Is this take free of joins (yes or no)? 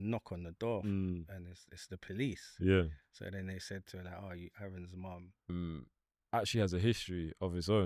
no